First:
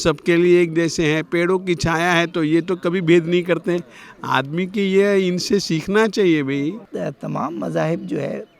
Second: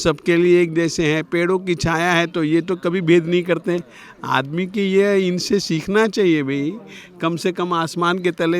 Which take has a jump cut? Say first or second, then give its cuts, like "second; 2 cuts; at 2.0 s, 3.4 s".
first; 1 cut; at 6.9 s